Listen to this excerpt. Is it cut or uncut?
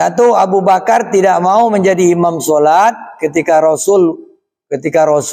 uncut